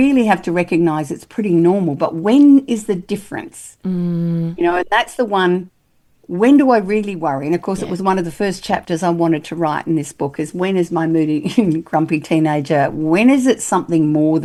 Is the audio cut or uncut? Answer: uncut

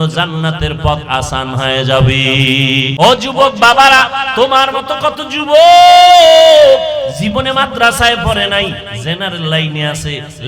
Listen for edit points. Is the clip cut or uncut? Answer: cut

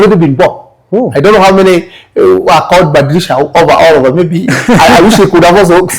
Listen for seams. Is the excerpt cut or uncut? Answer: uncut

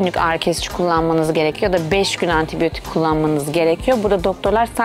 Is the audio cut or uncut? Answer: uncut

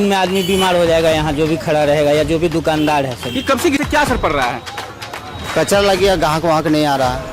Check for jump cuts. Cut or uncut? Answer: cut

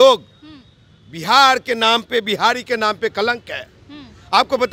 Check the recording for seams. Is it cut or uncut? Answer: uncut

